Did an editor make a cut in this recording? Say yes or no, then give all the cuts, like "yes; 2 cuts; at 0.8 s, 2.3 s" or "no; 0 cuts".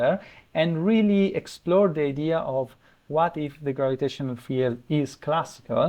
no; 0 cuts